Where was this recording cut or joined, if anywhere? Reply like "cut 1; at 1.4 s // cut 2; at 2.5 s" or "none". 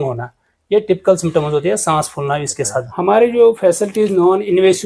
cut 1; at 2.8 s